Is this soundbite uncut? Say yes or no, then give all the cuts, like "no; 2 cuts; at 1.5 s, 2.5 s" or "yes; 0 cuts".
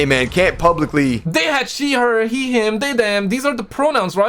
no; 1 cut; at 1.2 s